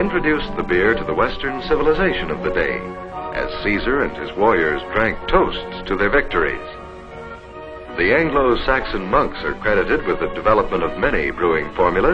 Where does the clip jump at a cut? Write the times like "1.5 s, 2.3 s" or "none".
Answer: 9.5 s